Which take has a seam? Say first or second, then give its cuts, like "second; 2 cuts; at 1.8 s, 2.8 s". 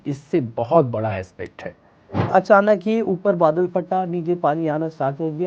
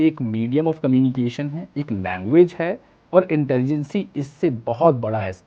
first; 1 cut; at 2.3 s